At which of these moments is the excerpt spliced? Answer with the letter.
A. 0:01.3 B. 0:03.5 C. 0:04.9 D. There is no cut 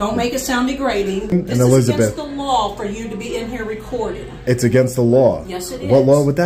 A